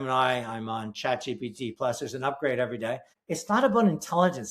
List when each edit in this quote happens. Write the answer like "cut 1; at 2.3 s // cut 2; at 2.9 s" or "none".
cut 1; at 3.1 s